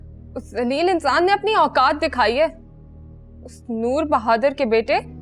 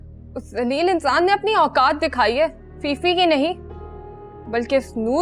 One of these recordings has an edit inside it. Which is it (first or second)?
second